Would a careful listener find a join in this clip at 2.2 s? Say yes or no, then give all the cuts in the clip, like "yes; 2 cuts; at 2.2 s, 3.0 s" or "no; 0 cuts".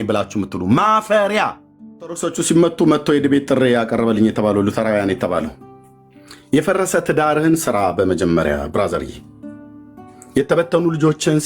yes; 1 cut; at 2.2 s